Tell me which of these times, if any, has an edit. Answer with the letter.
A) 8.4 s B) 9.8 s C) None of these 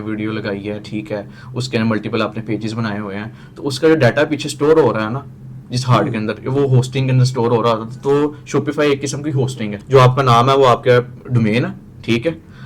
B